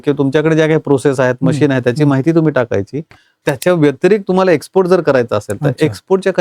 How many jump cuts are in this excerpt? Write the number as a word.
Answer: one